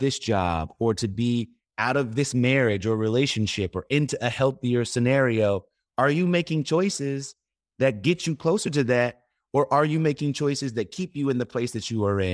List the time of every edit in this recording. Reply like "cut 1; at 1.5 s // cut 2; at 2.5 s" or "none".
none